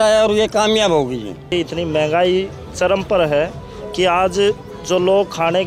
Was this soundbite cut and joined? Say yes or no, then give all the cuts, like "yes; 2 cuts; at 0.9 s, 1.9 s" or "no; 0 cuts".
yes; 1 cut; at 1.5 s